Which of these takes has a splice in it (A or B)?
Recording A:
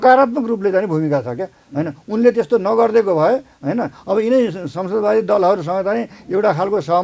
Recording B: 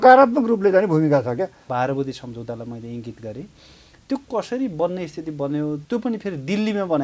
B